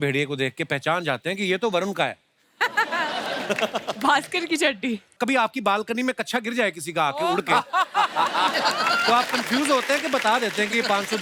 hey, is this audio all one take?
yes; 0 cuts

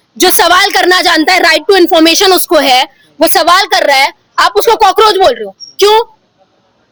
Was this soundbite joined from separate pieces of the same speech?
no; 0 cuts

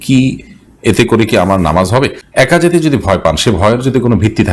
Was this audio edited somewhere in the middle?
no; 0 cuts

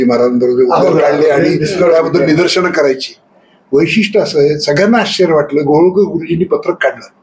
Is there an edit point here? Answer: no; 0 cuts

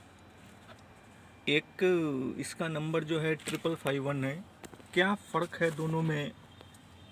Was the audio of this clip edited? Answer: no; 0 cuts

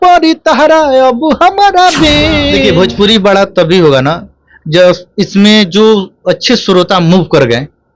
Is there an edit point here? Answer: yes; 1 cut; at 2.5 s

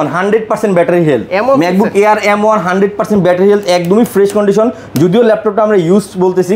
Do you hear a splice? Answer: no; 0 cuts

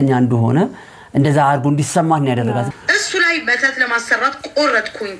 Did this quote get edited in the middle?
yes; 1 cut; at 2.7 s

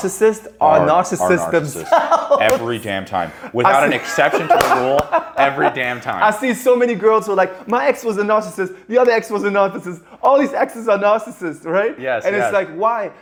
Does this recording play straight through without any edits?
yes; 0 cuts

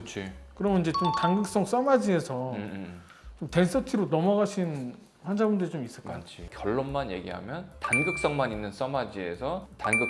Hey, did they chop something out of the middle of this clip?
no; 0 cuts

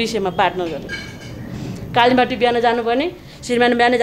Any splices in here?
no; 0 cuts

